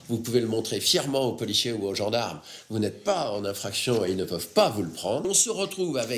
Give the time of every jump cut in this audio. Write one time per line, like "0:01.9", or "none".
0:05.2

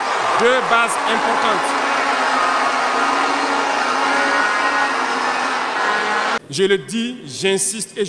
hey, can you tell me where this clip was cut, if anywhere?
0:06.4

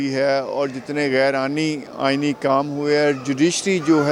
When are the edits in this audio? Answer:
none

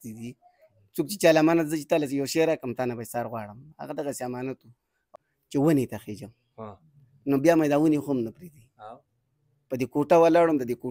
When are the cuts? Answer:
0:05.1

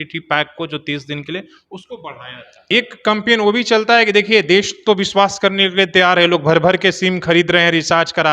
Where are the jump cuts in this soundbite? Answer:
0:02.6

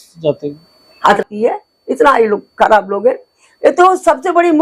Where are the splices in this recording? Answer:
0:01.2

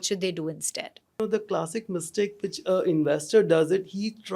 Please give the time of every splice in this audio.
0:01.2

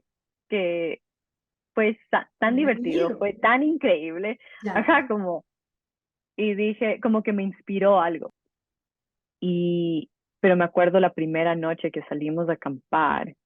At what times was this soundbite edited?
0:08.3

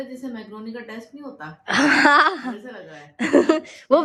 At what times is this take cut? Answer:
none

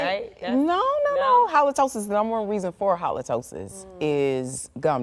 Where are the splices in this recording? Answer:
none

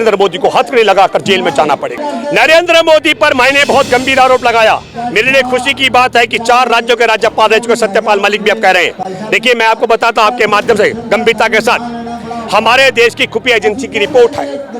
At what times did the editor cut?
0:02.1

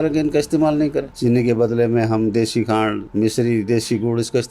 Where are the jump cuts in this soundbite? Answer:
0:01.1

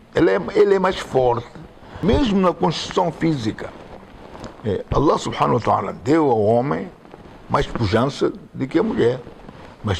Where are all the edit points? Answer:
0:01.9

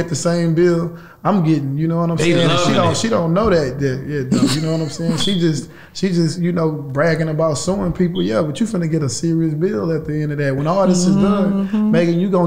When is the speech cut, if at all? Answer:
none

